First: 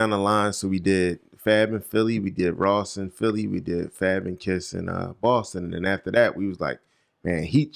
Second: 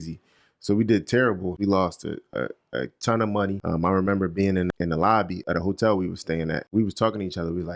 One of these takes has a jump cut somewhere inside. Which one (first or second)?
second